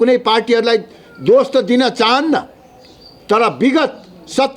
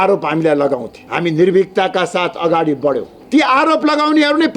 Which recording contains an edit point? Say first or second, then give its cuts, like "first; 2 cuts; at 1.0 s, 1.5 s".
second; 2 cuts; at 1.0 s, 3.1 s